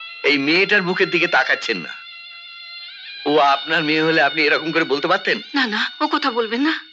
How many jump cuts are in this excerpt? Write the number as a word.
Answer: zero